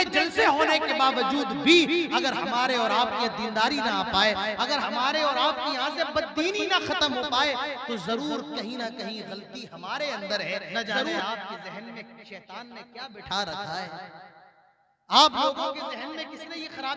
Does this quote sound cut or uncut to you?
cut